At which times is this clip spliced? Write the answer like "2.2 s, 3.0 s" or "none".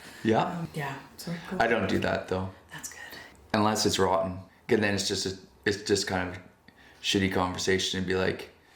3.3 s, 4.5 s